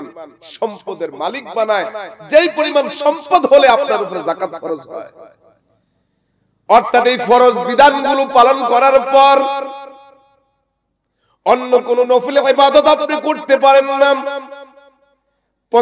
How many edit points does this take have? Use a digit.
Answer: 0